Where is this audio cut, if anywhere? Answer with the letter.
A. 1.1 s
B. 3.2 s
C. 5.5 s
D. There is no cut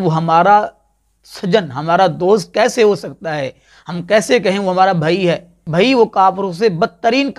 C